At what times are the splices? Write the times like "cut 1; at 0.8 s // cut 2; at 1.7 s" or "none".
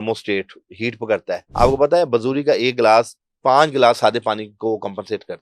cut 1; at 1.5 s